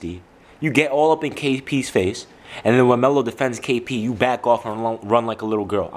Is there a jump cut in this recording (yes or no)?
no